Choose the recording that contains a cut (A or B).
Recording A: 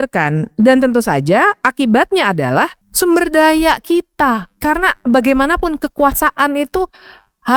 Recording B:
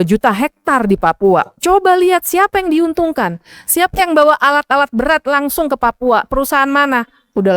A